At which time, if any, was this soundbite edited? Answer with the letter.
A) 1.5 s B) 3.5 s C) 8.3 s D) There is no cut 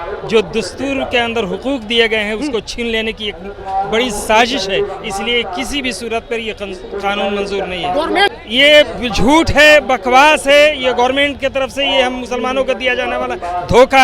C